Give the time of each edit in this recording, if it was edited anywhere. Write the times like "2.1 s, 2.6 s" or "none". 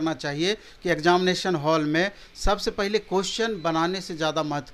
none